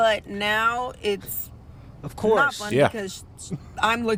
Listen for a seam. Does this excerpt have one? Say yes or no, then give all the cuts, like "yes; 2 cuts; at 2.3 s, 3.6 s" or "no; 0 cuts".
no; 0 cuts